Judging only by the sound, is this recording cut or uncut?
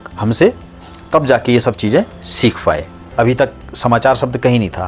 cut